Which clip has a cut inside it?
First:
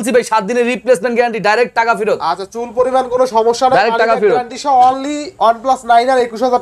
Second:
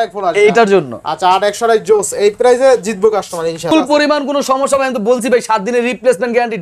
second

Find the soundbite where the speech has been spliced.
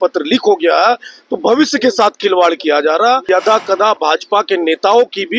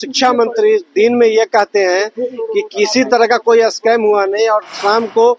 first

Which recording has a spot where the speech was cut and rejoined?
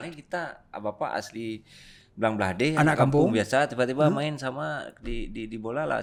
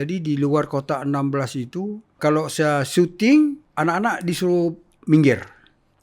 second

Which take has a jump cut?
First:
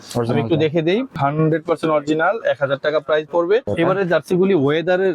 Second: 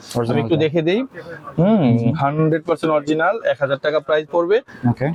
first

